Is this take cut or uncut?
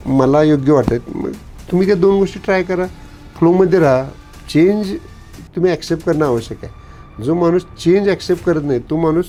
uncut